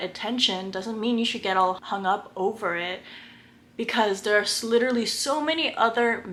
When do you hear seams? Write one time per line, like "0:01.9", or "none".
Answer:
none